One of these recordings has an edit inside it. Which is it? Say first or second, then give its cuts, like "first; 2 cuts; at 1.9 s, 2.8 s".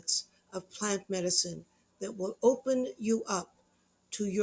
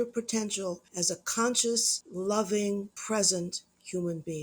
second; 3 cuts; at 0.9 s, 2.0 s, 2.9 s